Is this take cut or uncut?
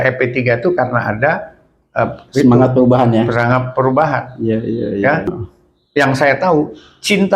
cut